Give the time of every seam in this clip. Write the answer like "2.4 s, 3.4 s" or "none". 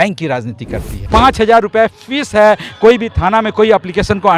1.0 s